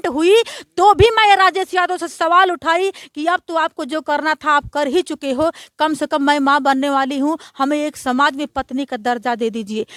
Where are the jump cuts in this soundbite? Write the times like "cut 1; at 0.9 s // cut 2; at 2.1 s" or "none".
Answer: none

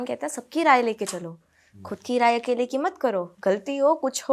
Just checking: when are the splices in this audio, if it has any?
none

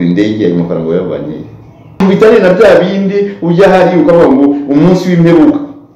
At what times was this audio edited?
cut 1; at 2.0 s

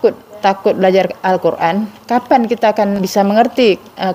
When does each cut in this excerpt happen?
cut 1; at 3.0 s

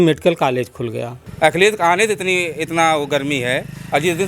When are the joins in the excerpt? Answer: cut 1; at 1.2 s

